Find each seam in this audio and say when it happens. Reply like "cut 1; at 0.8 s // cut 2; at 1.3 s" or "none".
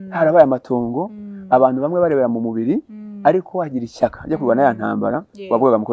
none